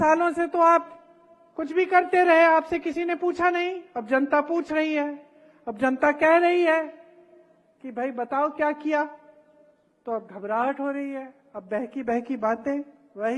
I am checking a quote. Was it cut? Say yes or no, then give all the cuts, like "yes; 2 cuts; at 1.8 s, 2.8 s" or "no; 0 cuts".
no; 0 cuts